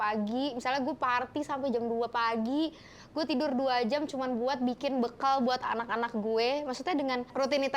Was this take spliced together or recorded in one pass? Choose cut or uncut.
uncut